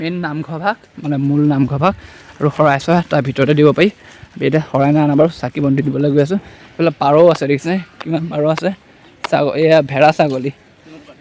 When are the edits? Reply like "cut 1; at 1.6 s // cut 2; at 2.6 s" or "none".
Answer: none